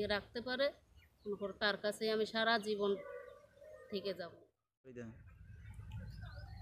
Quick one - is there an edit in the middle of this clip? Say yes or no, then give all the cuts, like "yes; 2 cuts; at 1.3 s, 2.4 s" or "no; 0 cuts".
yes; 1 cut; at 5.1 s